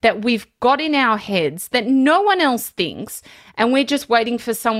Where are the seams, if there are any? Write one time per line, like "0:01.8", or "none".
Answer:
none